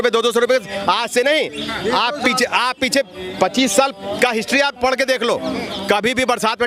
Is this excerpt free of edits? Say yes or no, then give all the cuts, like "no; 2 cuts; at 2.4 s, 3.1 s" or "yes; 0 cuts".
yes; 0 cuts